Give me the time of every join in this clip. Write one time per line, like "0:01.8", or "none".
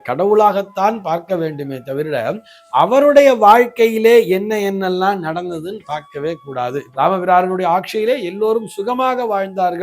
0:06.9